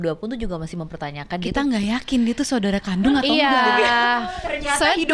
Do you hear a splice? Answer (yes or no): no